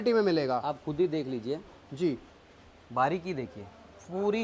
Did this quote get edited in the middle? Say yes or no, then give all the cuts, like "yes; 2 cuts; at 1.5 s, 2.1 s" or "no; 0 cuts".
no; 0 cuts